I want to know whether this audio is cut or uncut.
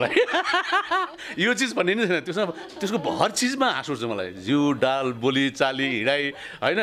uncut